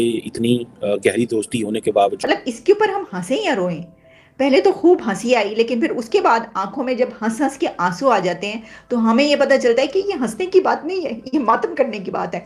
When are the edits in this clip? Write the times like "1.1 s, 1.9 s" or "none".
2.2 s

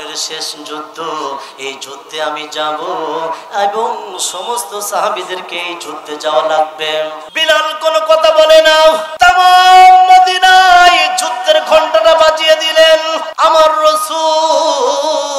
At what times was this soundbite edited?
7.3 s, 9.1 s, 13.2 s

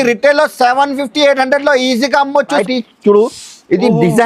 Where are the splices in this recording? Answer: 2.6 s

